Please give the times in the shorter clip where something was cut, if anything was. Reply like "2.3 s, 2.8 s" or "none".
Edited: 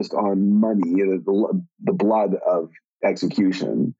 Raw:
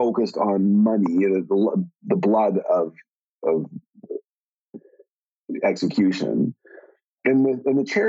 2.8 s

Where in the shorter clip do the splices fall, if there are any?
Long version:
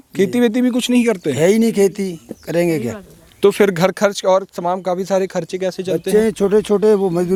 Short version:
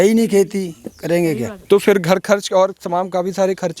1.5 s

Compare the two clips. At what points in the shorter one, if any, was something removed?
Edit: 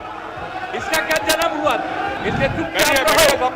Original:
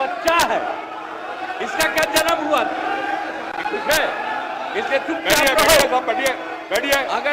2.2 s

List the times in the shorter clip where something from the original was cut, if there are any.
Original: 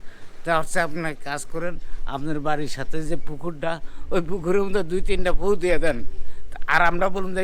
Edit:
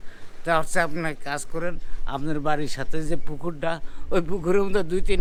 none

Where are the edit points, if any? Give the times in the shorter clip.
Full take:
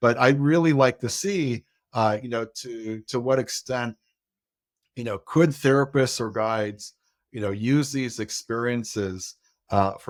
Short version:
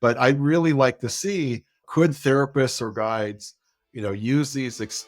1.8 s

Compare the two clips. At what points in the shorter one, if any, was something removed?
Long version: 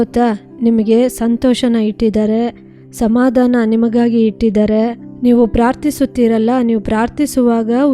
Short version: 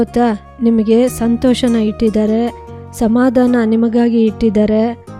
none

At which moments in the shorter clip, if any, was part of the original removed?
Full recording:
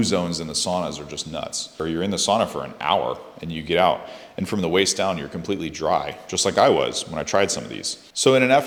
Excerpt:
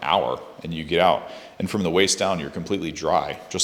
none

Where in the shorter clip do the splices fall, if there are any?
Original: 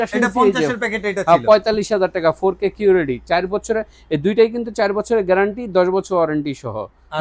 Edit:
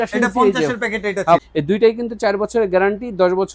1.4 s

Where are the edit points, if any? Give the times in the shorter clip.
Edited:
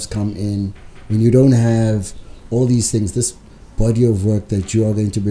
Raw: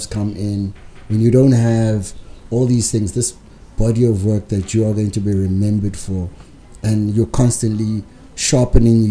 none

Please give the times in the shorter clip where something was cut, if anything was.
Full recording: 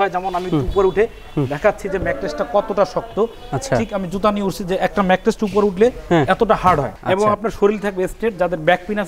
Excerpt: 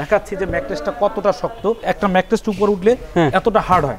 1.8 s

